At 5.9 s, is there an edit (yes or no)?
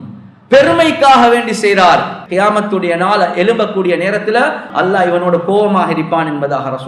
no